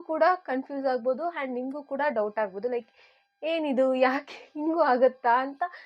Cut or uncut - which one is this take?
uncut